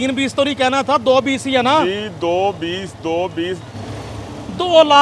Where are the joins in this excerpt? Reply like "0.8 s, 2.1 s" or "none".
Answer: 3.8 s